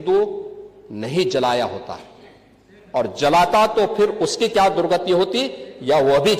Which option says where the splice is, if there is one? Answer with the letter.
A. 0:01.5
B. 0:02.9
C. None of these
C